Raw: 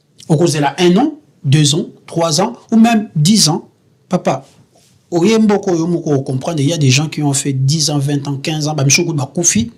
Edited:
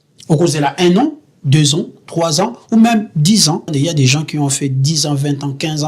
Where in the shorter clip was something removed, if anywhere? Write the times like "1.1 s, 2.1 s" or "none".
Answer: 3.7 s